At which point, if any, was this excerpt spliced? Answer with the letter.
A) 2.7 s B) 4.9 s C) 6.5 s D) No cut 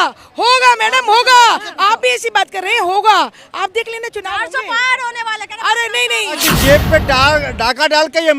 C